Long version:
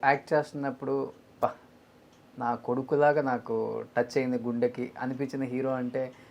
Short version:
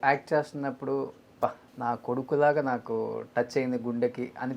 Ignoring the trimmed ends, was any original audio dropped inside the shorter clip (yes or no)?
yes